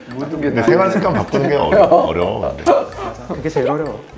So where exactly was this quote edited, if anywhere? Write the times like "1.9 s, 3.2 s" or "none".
none